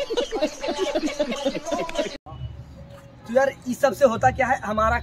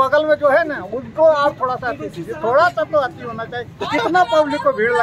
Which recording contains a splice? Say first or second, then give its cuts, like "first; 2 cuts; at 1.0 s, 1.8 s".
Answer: first; 1 cut; at 2.2 s